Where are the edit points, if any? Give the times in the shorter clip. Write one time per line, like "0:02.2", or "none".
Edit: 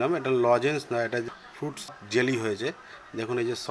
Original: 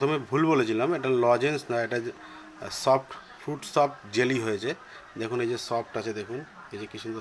0:02.0